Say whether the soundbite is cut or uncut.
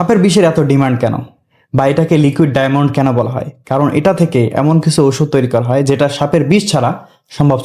uncut